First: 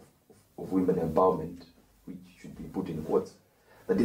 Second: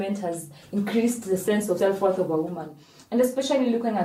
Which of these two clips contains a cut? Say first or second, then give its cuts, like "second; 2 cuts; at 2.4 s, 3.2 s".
second; 1 cut; at 1.8 s